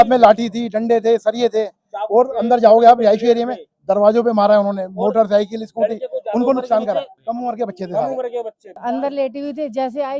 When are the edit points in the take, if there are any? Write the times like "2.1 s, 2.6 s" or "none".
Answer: 7.1 s, 8.7 s